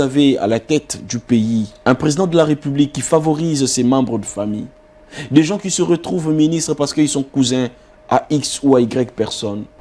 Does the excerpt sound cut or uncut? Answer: cut